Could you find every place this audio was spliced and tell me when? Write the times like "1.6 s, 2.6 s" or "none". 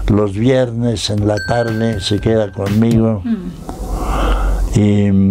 none